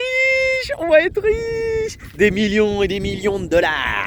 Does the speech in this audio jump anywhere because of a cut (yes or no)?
no